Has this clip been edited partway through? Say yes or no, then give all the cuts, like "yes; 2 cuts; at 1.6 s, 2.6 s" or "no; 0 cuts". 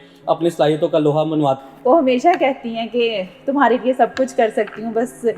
yes; 1 cut; at 1.6 s